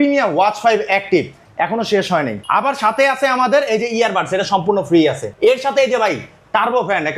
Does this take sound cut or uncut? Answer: cut